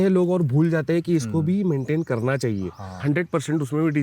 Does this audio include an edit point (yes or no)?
yes